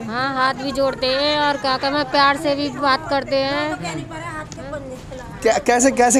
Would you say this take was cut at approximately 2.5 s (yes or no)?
no